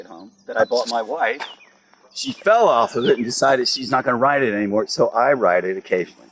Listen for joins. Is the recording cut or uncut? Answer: uncut